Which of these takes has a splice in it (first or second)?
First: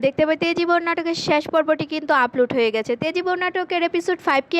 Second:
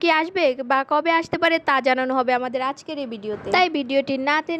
second